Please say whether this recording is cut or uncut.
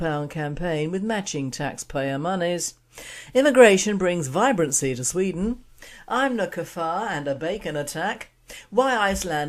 cut